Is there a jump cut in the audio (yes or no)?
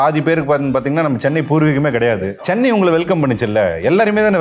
yes